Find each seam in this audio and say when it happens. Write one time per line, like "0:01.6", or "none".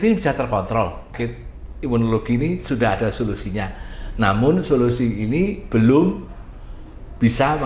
0:01.2